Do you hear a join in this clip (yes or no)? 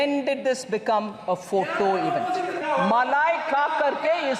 yes